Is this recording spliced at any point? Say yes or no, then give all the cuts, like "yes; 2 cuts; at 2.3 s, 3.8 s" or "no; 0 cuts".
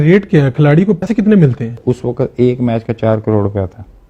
yes; 1 cut; at 1.0 s